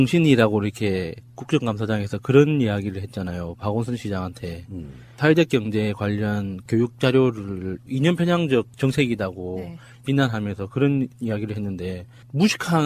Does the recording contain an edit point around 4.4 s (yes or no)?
no